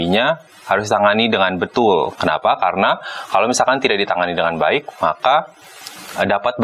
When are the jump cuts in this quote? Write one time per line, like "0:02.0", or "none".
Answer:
none

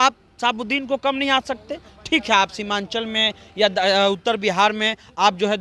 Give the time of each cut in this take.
none

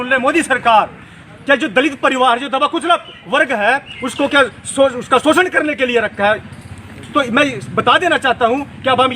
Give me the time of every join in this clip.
0:01.1

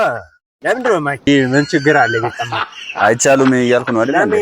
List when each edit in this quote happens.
0:01.3

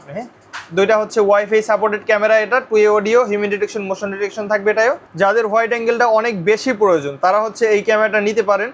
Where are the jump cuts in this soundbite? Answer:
0:05.1

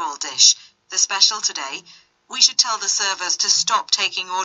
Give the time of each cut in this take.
0:01.9

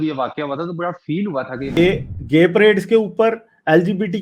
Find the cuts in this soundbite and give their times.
0:01.8

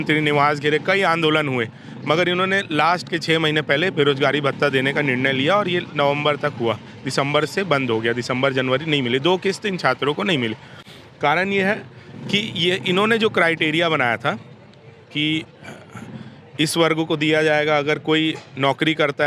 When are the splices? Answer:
none

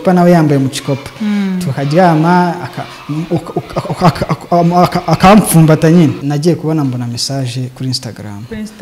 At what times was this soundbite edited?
0:06.3

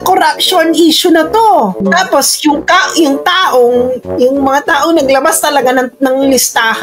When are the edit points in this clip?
0:01.8

